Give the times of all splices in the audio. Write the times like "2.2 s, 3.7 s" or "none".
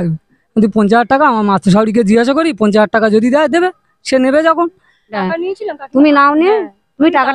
5.2 s